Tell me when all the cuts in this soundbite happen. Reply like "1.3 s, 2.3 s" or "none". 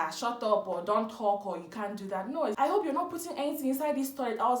2.5 s